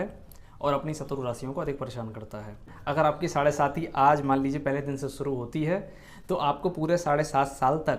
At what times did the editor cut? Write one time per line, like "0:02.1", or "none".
0:02.7